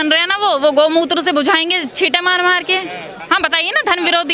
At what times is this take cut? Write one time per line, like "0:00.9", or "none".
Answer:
0:03.1